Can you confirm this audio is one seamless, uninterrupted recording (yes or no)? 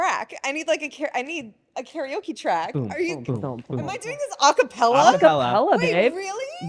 yes